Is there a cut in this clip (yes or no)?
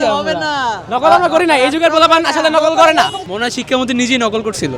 yes